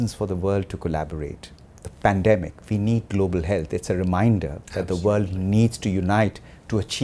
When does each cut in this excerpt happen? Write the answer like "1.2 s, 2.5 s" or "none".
none